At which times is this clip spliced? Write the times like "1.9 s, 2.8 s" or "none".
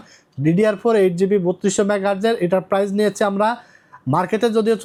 none

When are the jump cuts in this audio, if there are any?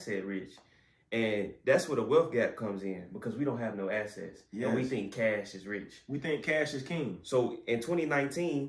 none

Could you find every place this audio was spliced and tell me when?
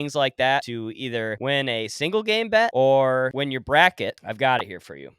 0.9 s, 2.7 s, 3.3 s, 4.2 s

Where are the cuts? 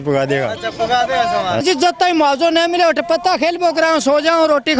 1.6 s

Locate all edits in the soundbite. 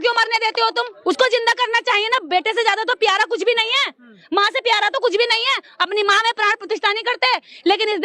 0.9 s

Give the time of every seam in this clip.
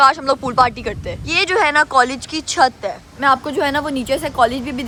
none

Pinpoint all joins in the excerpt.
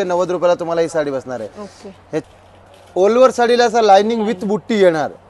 2.2 s

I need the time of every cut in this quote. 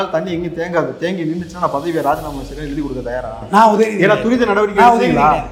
none

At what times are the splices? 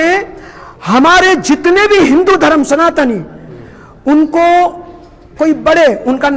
none

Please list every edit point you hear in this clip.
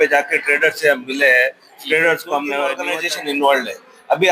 2.8 s

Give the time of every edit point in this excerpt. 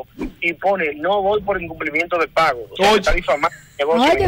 none

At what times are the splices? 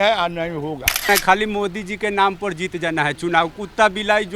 1.1 s

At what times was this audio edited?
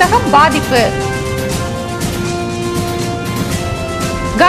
none

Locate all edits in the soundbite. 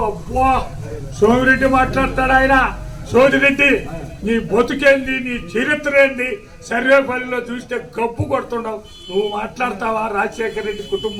none

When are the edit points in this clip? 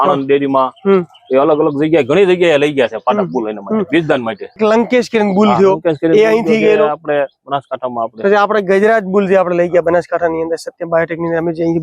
4.5 s

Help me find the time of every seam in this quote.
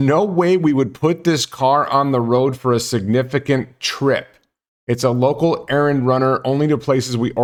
none

